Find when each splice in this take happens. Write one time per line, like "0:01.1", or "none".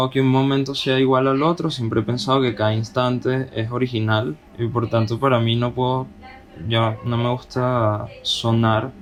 none